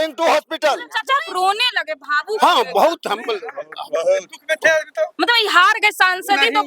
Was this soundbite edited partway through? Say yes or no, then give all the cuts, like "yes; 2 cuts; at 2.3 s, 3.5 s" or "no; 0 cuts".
yes; 1 cut; at 0.9 s